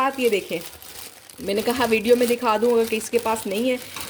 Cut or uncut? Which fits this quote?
uncut